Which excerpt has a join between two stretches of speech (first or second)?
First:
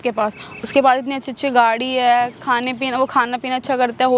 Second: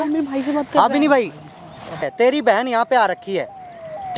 second